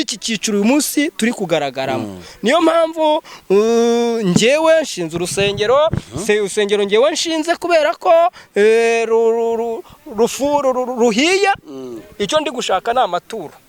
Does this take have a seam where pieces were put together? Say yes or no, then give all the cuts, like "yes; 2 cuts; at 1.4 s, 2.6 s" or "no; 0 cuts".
no; 0 cuts